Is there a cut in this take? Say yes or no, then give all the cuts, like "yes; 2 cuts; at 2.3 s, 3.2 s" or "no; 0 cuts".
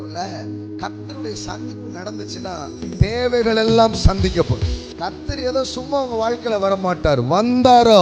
yes; 1 cut; at 4.8 s